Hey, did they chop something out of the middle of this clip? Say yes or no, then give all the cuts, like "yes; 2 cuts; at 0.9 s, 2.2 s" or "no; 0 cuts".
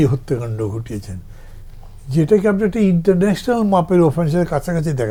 no; 0 cuts